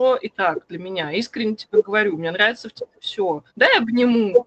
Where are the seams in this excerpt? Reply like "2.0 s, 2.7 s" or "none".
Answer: 3.5 s